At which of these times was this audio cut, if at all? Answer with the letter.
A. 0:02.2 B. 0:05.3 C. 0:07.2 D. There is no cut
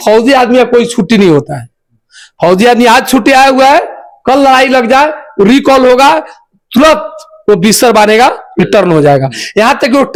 D